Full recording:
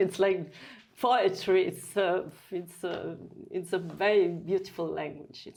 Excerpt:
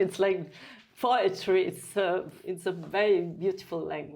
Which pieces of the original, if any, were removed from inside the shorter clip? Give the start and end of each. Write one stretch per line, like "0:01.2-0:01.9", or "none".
0:02.4-0:03.4